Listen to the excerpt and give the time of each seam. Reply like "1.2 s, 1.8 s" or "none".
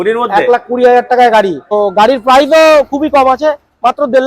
1.7 s